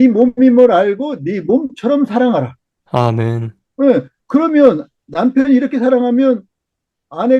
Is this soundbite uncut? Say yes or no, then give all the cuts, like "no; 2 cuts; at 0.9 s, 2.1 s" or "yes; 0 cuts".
yes; 0 cuts